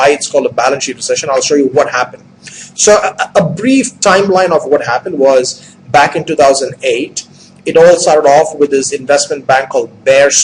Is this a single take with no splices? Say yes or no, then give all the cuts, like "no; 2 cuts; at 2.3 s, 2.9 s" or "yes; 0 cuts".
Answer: no; 1 cut; at 3.9 s